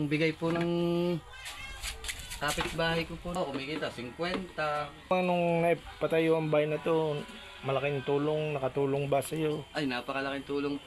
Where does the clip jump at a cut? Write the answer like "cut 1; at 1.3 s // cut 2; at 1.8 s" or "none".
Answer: cut 1; at 3.4 s // cut 2; at 5.1 s